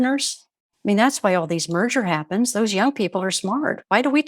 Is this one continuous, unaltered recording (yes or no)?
yes